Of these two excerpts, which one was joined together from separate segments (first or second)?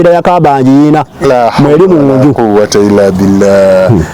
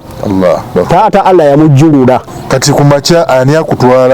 second